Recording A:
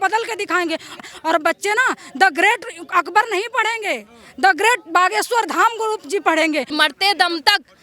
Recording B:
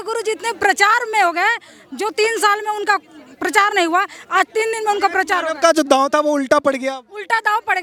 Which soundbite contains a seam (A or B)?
A